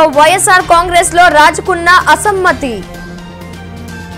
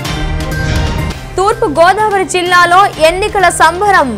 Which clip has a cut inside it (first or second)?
second